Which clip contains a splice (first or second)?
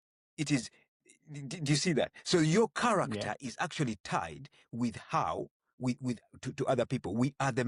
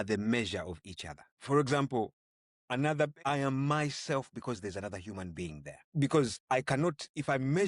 second